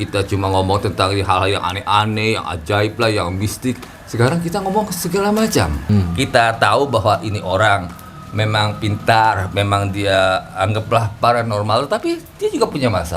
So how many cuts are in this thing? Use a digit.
1